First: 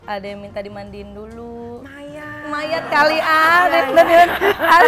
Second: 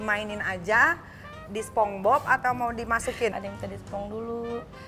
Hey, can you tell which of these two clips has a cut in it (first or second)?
second